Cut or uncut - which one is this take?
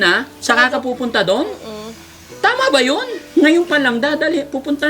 cut